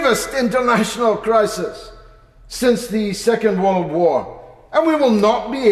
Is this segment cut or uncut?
uncut